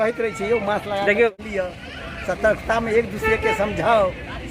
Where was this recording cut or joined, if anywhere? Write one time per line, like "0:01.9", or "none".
0:01.4